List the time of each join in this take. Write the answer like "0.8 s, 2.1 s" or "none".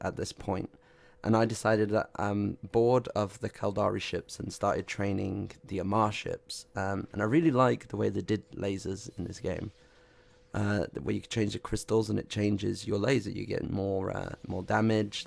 none